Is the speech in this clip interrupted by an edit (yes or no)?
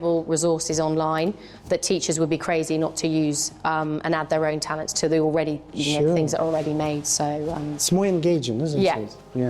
no